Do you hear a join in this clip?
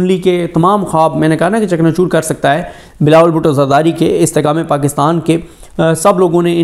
no; 0 cuts

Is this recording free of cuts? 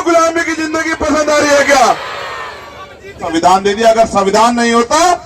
no; 1 cut; at 3.2 s

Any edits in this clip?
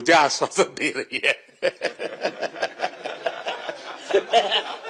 no; 0 cuts

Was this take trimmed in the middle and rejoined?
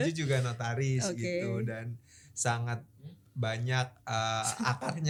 no; 0 cuts

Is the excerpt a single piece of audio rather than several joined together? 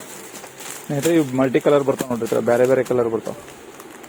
yes; 0 cuts

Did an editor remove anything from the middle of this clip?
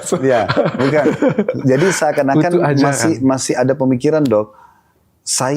no; 0 cuts

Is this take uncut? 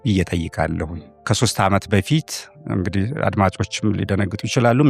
no; 1 cut; at 1.2 s

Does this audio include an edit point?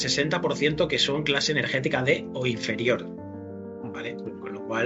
no; 0 cuts

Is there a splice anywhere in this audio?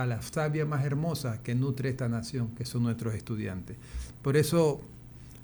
no; 0 cuts

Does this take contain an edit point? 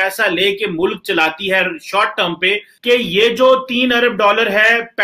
no; 0 cuts

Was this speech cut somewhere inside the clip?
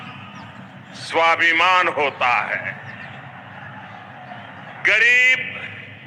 no; 0 cuts

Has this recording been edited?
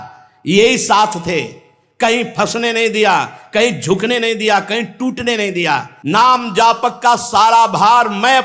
yes; 1 cut; at 5.9 s

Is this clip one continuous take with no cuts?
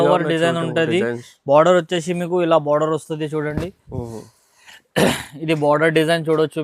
yes; 0 cuts

